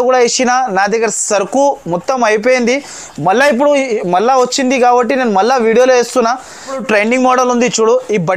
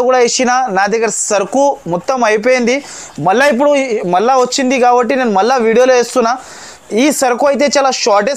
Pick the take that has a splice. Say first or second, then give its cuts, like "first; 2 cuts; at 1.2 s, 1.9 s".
first; 1 cut; at 6.8 s